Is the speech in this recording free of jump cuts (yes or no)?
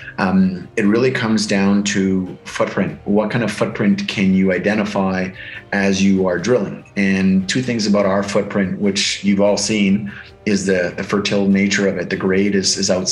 yes